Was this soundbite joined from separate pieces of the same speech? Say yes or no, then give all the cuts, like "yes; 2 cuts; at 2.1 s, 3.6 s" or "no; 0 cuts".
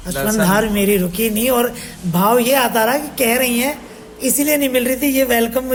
no; 0 cuts